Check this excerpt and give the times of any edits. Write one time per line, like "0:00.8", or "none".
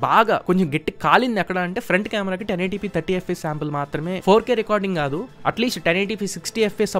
0:04.2